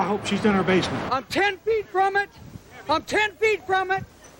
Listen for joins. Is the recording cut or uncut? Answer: cut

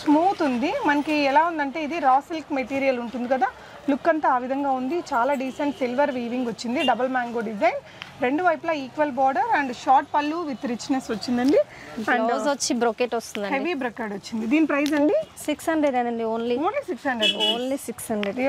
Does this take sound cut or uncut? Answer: uncut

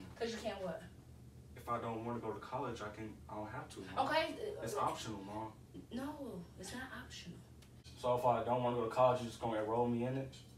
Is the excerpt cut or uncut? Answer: cut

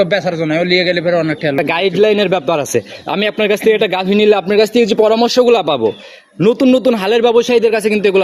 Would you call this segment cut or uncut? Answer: cut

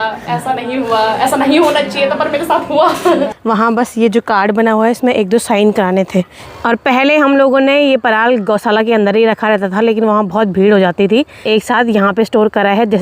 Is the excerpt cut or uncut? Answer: cut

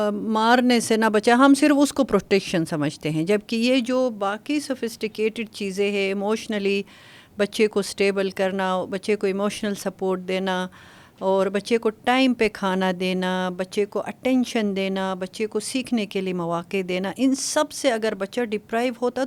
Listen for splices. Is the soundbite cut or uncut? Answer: uncut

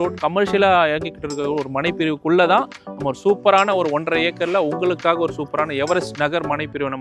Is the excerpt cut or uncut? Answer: uncut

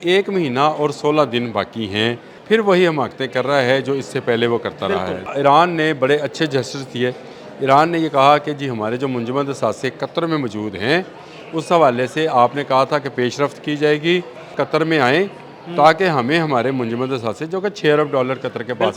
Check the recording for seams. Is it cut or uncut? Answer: cut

